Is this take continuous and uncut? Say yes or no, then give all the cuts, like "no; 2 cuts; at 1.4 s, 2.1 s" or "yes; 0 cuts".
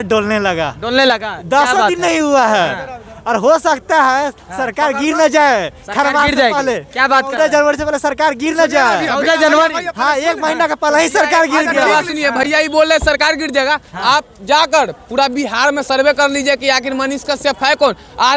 yes; 0 cuts